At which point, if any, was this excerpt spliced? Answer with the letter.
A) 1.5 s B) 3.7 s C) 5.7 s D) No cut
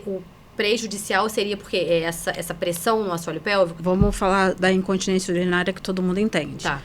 B